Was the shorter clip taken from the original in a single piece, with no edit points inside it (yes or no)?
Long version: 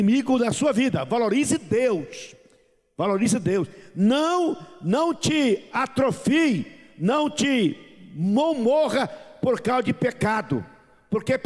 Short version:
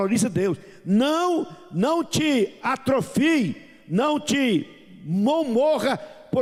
yes